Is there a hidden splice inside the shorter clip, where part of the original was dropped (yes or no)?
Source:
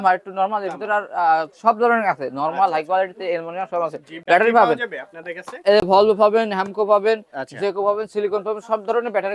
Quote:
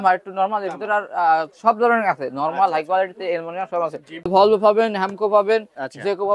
yes